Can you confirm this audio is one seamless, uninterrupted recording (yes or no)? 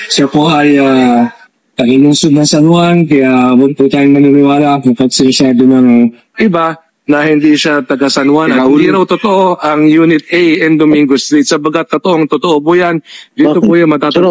yes